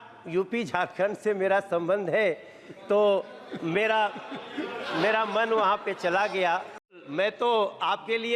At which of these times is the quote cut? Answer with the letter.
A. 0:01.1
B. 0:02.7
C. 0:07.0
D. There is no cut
C